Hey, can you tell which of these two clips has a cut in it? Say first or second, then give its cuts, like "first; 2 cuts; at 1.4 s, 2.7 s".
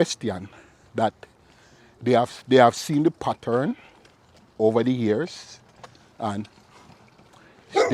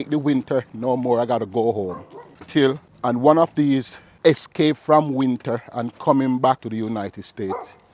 second; 3 cuts; at 2.8 s, 4.0 s, 6.6 s